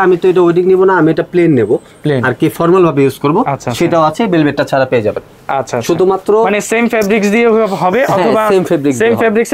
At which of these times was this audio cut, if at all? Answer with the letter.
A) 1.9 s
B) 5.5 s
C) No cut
C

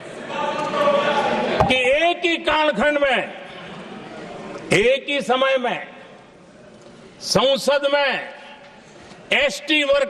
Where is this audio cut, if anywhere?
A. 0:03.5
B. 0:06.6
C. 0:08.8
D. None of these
D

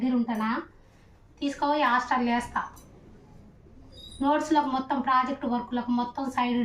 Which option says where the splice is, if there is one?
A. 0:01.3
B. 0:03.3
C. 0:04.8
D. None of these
D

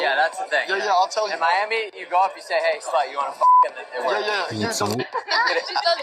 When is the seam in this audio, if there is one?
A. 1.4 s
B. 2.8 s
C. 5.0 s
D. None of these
C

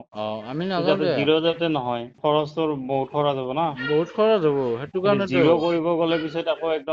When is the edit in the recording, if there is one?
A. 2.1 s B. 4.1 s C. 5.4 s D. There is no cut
A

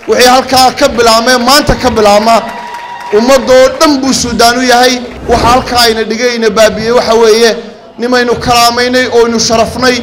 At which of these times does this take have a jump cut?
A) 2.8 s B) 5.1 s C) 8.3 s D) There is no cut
B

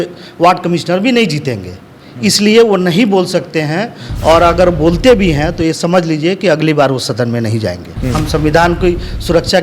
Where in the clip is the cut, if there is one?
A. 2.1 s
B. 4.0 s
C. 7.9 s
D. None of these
C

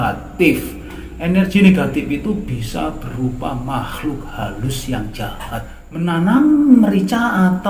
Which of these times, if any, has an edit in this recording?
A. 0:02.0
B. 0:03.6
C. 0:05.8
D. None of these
C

